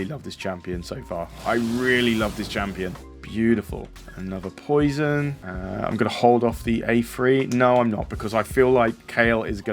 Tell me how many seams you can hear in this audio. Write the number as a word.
zero